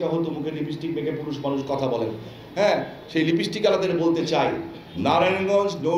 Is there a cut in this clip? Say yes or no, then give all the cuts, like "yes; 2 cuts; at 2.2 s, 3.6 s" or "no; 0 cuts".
no; 0 cuts